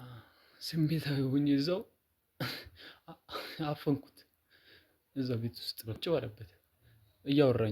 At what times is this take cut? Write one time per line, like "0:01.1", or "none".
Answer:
0:06.0